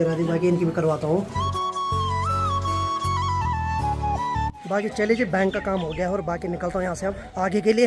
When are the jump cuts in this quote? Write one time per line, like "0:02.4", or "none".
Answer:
none